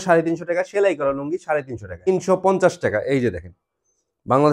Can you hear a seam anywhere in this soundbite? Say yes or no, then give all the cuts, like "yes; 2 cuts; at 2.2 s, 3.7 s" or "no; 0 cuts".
yes; 1 cut; at 2.1 s